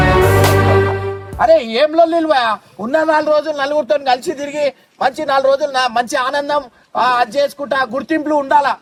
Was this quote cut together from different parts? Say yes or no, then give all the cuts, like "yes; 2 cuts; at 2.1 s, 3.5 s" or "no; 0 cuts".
no; 0 cuts